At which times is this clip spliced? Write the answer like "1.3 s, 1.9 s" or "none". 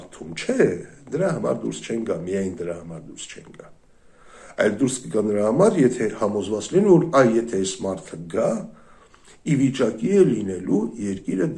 none